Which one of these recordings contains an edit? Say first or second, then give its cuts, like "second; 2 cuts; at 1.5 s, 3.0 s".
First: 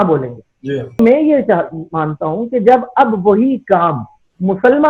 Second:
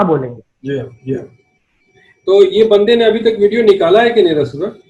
first; 1 cut; at 1.0 s